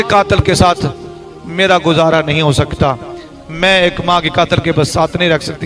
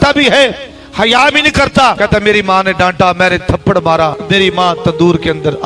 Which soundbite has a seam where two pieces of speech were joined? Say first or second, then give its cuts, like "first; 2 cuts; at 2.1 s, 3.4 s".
second; 2 cuts; at 2.0 s, 4.2 s